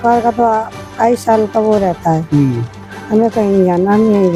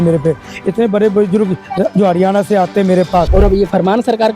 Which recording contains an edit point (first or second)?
second